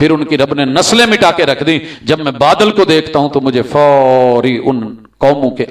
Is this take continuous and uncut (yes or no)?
yes